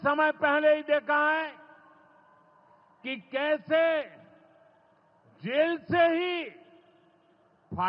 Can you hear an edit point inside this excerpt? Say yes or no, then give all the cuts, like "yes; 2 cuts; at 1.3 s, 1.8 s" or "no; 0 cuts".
no; 0 cuts